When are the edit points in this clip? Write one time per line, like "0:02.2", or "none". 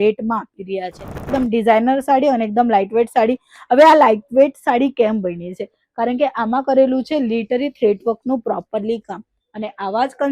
0:01.1